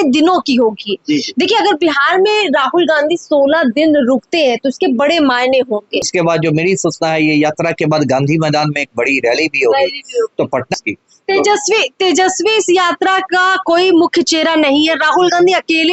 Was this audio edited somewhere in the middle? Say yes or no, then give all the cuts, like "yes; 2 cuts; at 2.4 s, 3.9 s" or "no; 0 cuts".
yes; 2 cuts; at 6.1 s, 10.7 s